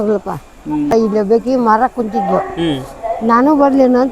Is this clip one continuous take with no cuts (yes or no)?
no